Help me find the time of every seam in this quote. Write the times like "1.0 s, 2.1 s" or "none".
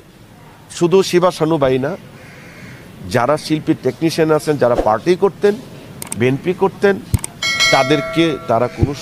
none